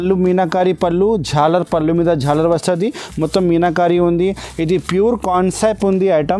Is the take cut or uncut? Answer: uncut